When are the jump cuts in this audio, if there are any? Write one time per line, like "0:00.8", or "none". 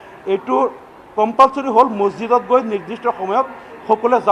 none

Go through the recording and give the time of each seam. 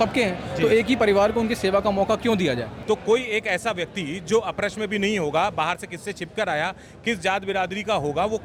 0:02.7

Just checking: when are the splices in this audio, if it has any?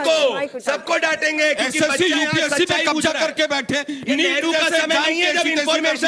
none

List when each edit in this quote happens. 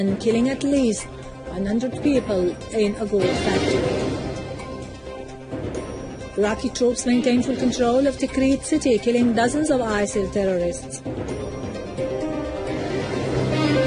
0:08.6

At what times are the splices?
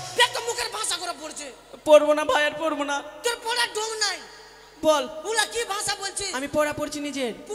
none

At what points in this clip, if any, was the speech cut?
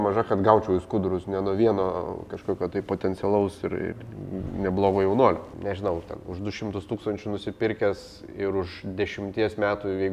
0:05.5

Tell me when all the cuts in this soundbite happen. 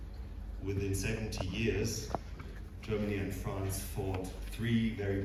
none

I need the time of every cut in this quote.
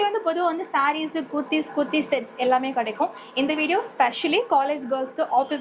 none

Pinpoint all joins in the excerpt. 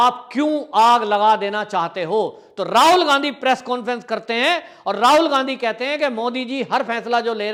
none

